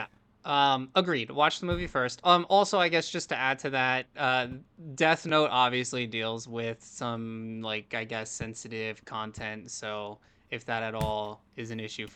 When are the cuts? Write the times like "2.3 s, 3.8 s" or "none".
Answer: none

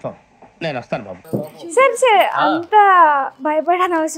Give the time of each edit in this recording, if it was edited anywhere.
none

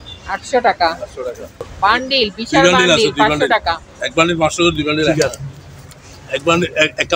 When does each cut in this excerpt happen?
1.7 s, 5.1 s

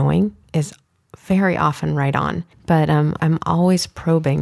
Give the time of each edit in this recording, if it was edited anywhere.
2.5 s, 3.2 s

